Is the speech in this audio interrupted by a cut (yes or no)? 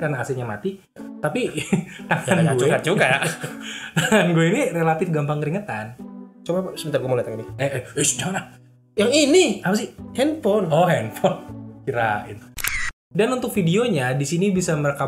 yes